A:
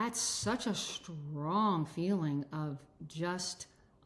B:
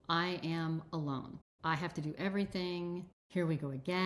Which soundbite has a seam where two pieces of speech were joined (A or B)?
B